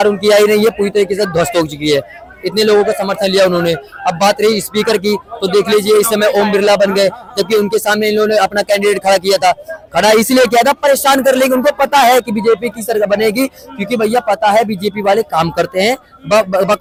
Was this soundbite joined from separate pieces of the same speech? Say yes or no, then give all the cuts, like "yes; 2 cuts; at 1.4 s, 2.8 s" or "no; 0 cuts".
no; 0 cuts